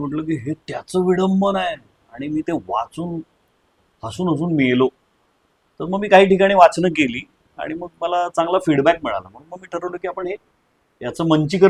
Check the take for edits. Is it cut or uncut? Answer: uncut